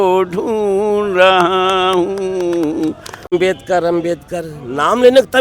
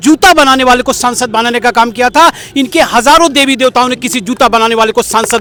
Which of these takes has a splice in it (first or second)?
first